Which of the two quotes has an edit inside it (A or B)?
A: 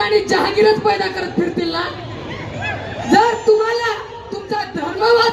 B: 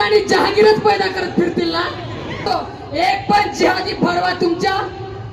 B